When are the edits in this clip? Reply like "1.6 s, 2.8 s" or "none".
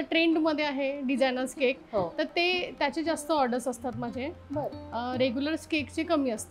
none